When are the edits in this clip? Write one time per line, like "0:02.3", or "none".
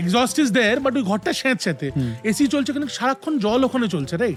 none